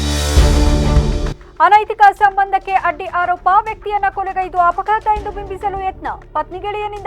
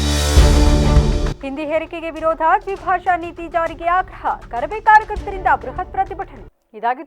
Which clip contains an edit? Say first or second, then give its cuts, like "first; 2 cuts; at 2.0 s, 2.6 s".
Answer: first; 1 cut; at 1.3 s